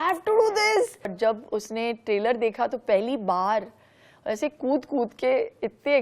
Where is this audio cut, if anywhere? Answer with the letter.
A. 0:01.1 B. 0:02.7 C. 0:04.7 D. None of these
A